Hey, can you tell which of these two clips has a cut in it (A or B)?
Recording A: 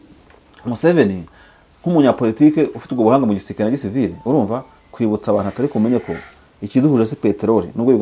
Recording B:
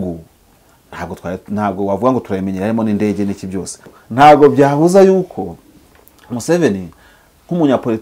B